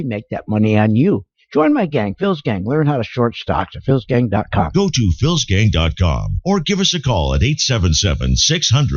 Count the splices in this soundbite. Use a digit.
0